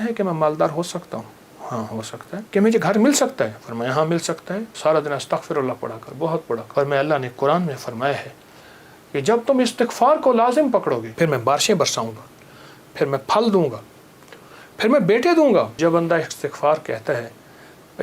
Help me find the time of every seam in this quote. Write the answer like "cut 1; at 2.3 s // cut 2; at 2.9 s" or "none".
cut 1; at 2.5 s // cut 2; at 4.7 s // cut 3; at 6.7 s // cut 4; at 11.1 s // cut 5; at 15.7 s